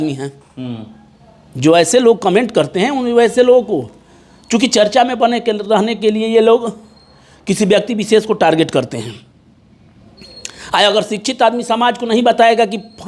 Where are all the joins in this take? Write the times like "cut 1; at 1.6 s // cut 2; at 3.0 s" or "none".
none